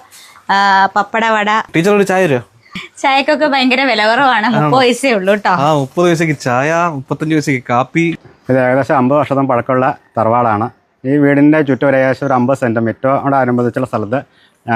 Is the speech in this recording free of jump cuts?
no; 3 cuts; at 1.7 s, 2.8 s, 8.2 s

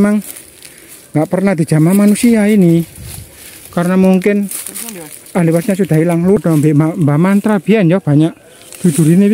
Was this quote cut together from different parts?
yes; 1 cut; at 6.4 s

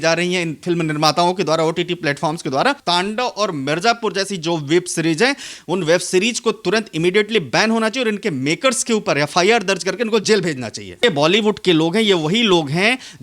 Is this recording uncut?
no; 2 cuts; at 2.8 s, 11.0 s

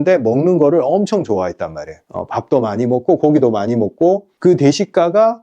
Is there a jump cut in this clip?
yes; 1 cut; at 4.3 s

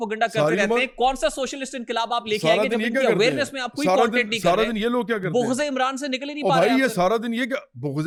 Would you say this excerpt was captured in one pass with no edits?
yes; 0 cuts

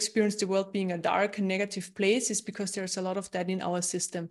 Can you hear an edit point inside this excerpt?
no; 0 cuts

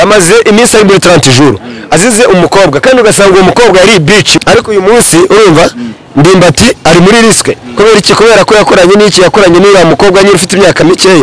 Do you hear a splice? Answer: yes; 1 cut; at 4.3 s

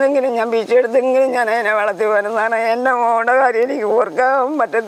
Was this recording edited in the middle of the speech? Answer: no; 0 cuts

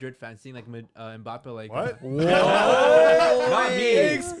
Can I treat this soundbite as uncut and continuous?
yes; 0 cuts

